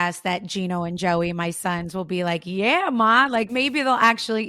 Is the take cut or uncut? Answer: cut